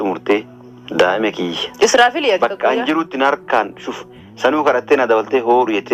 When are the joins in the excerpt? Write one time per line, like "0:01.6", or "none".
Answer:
none